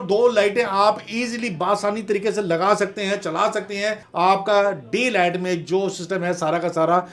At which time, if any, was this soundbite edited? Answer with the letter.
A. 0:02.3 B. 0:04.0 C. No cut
B